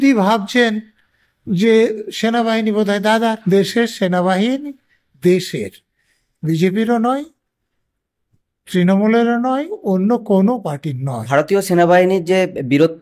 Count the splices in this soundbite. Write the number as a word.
two